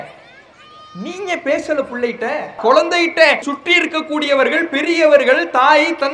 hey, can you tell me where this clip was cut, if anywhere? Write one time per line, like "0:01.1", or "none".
0:02.6
0:03.5